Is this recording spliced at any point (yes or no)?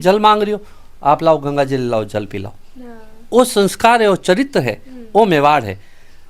no